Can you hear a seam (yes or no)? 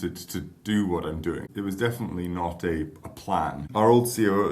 yes